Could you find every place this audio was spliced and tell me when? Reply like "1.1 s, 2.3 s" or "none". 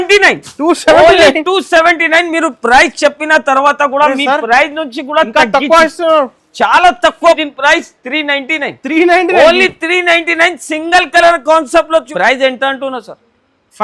7.4 s, 12.1 s